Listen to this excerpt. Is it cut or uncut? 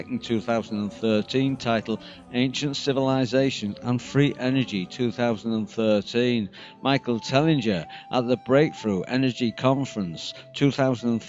cut